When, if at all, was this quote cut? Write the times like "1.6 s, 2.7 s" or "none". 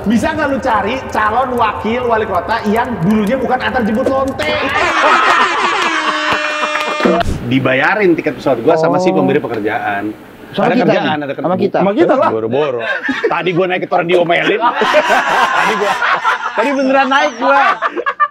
7.2 s